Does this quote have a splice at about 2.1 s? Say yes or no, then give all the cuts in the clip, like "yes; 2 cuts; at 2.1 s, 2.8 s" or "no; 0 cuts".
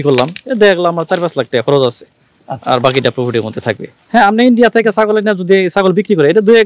no; 1 cut; at 3.9 s